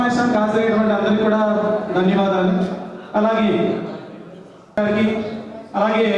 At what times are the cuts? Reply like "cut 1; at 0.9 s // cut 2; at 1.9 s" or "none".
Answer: cut 1; at 4.8 s